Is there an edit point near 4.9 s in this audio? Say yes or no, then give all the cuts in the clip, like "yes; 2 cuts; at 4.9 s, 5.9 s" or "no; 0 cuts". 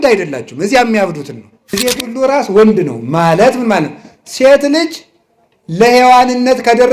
no; 1 cut; at 1.8 s